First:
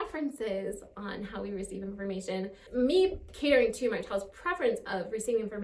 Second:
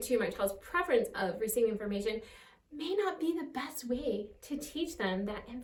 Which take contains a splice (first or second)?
first